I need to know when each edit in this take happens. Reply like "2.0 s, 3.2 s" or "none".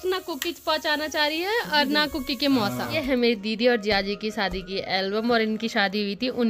3.0 s